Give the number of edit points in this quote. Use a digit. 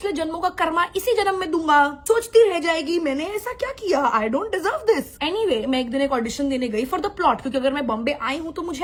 0